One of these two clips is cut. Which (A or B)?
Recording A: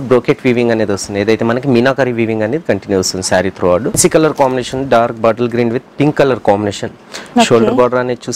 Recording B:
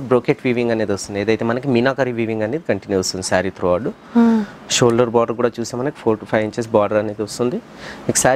A